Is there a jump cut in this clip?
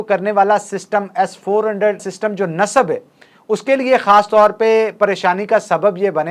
yes; 1 cut; at 2.1 s

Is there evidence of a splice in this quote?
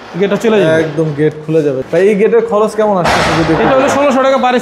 yes; 1 cut; at 1.8 s

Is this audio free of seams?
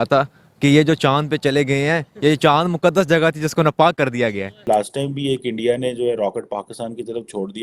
no; 1 cut; at 4.6 s

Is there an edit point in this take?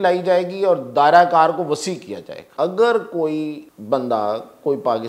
yes; 2 cuts; at 2.4 s, 3.7 s

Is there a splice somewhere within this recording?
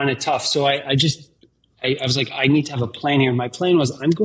no; 0 cuts

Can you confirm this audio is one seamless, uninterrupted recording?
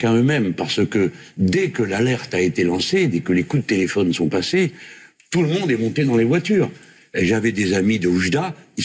yes; 0 cuts

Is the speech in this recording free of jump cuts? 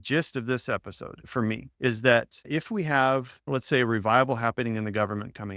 no; 3 cuts; at 1.2 s, 2.4 s, 3.3 s

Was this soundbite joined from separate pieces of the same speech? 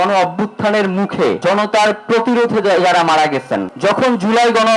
yes; 2 cuts; at 1.4 s, 3.7 s

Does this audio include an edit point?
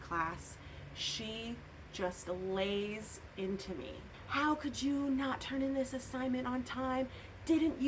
yes; 1 cut; at 4.1 s

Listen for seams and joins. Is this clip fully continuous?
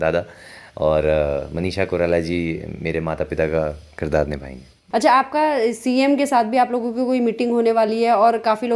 yes; 0 cuts

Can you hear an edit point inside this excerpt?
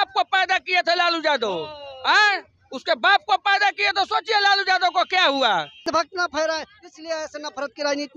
yes; 1 cut; at 5.9 s

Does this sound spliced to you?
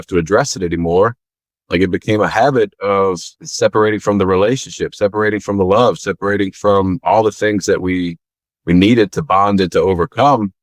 yes; 2 cuts; at 1.6 s, 3.5 s

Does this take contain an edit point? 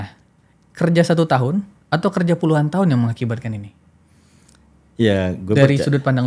no; 0 cuts

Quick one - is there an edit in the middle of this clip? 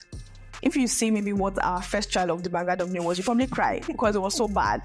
no; 0 cuts

